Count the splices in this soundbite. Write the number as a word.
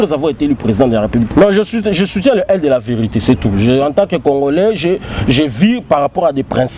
one